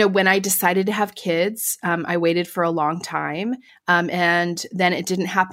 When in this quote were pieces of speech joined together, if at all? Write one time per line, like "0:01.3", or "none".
0:03.7